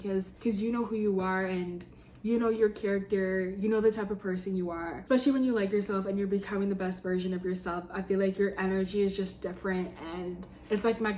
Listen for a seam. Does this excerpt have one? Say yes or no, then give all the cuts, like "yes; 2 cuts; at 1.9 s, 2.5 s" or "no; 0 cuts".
no; 0 cuts